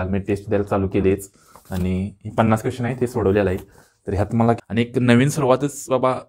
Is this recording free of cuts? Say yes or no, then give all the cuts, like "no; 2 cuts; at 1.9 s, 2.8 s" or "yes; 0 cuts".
no; 1 cut; at 4.6 s